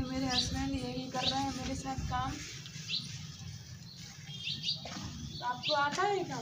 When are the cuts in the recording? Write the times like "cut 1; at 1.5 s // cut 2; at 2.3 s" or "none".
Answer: none